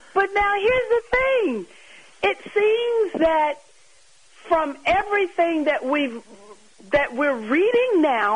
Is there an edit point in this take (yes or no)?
no